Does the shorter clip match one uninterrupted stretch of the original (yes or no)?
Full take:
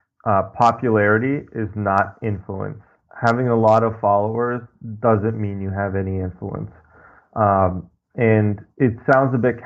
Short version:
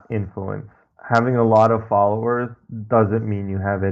yes